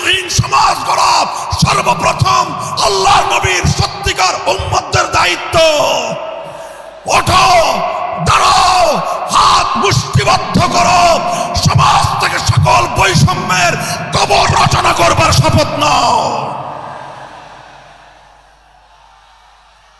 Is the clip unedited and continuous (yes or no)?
yes